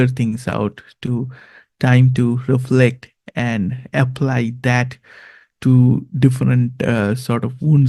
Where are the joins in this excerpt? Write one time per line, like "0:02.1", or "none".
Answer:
none